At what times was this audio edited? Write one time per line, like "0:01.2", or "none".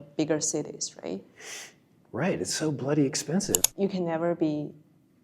0:03.6